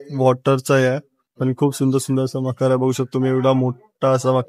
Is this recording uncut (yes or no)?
yes